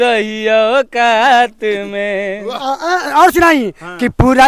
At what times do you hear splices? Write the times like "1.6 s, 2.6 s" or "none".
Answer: none